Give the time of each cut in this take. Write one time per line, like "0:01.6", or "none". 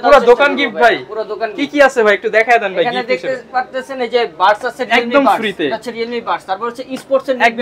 none